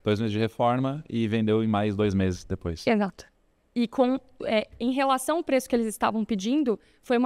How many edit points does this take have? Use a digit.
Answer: 0